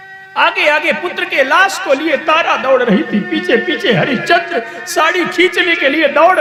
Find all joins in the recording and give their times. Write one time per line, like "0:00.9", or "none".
none